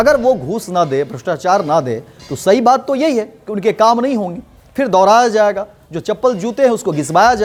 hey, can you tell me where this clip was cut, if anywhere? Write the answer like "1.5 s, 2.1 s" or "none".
none